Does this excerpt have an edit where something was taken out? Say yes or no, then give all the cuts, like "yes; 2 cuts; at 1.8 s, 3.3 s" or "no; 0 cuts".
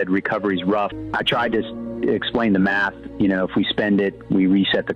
yes; 1 cut; at 1.0 s